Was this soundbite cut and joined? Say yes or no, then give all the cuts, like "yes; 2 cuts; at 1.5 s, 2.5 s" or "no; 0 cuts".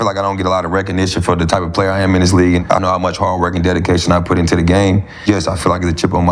yes; 2 cuts; at 2.7 s, 5.2 s